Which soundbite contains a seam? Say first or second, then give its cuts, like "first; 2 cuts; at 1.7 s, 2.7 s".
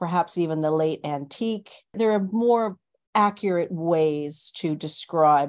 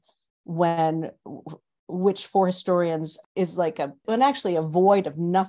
first; 1 cut; at 1.9 s